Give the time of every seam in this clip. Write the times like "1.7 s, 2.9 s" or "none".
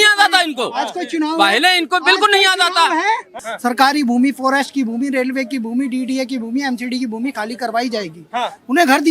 3.4 s